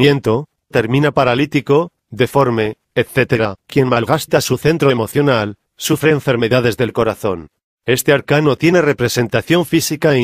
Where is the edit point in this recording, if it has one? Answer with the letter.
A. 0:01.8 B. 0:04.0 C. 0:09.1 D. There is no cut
C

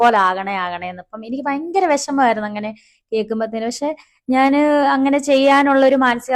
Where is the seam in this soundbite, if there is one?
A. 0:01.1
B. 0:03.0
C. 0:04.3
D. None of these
D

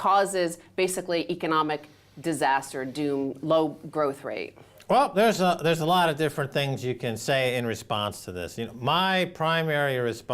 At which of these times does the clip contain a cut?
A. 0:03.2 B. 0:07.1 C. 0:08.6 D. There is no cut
A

